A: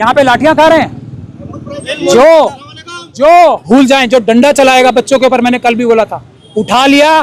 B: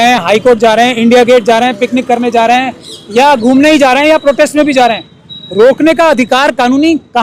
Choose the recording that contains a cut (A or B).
A